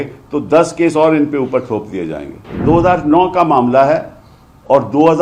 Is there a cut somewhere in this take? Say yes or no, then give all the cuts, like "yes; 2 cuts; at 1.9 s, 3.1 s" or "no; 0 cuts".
yes; 1 cut; at 2.6 s